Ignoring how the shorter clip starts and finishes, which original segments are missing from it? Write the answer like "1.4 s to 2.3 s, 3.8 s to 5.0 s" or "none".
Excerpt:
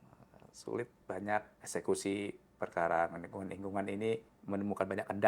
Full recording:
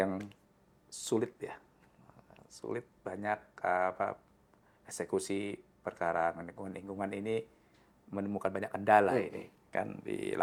3.5 s to 4.8 s, 7.6 s to 8.0 s